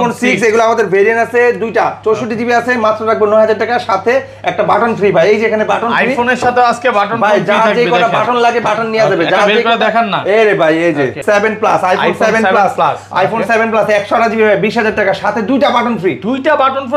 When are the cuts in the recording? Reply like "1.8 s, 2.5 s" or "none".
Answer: 11.2 s